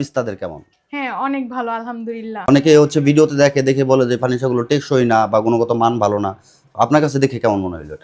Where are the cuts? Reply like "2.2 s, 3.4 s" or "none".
2.5 s